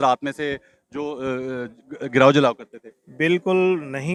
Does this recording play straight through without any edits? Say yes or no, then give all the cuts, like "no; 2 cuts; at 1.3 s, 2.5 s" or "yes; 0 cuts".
yes; 0 cuts